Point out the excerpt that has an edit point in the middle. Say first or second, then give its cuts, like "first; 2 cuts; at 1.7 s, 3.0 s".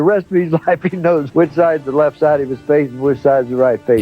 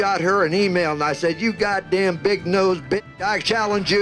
first; 1 cut; at 1.3 s